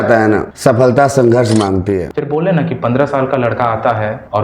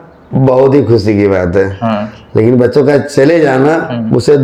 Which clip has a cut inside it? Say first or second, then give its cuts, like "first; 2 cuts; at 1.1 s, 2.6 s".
first; 1 cut; at 2.1 s